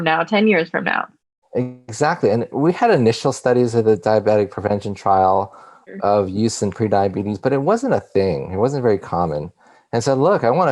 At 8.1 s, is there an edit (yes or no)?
no